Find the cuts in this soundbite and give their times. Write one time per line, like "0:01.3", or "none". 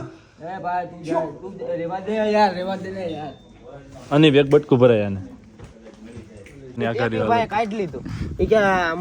0:06.8